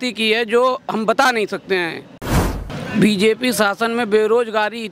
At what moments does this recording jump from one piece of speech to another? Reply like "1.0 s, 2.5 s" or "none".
2.6 s